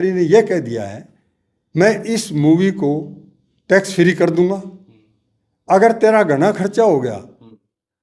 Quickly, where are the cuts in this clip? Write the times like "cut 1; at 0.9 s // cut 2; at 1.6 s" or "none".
none